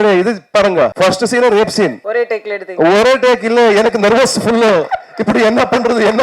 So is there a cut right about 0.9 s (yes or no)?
yes